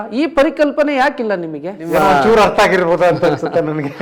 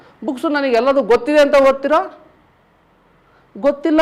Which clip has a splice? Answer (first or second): first